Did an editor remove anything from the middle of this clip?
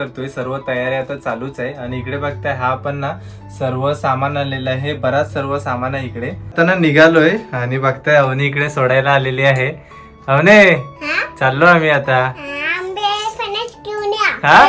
yes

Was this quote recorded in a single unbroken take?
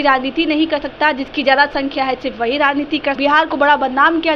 no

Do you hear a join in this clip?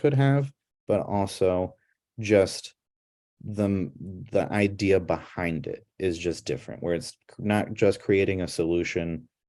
no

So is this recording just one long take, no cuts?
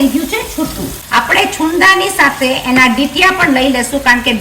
no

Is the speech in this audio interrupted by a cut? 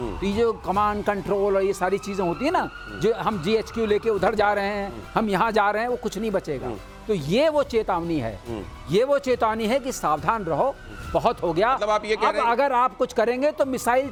no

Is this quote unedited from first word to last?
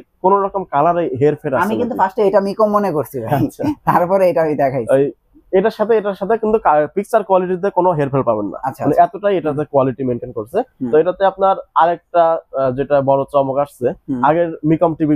yes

